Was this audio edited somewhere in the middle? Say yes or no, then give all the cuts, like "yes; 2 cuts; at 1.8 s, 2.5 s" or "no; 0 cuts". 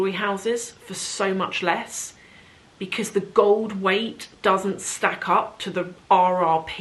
no; 0 cuts